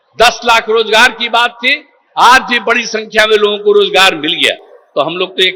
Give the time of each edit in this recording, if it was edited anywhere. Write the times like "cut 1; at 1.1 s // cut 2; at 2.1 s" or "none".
none